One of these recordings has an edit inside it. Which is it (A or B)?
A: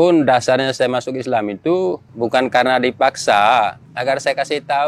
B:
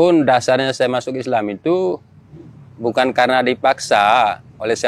A